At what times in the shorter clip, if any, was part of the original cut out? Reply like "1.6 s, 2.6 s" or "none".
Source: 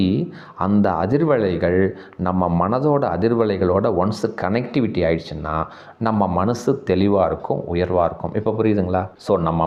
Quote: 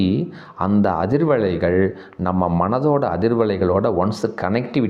none